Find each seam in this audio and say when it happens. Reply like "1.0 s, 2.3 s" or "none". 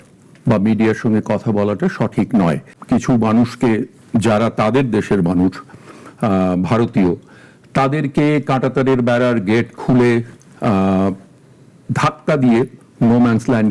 2.7 s

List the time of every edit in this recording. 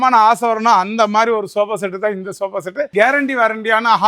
2.9 s

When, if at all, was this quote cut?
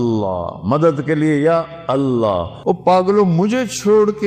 2.5 s

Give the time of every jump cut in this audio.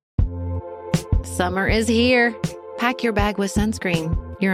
1.0 s

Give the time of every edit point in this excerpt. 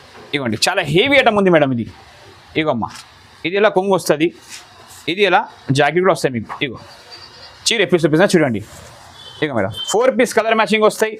none

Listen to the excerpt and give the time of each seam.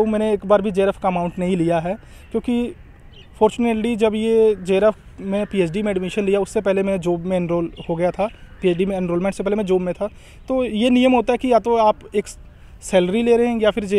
none

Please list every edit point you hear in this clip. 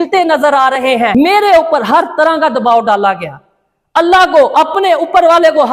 1.1 s

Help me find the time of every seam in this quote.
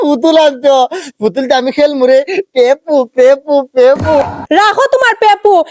4.2 s

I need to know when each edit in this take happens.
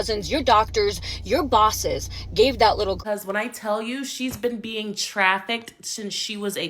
3.0 s

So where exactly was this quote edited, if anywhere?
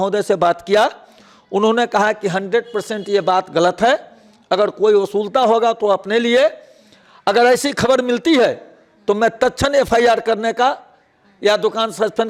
none

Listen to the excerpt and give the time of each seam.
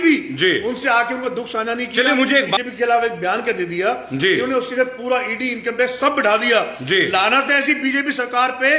2.6 s

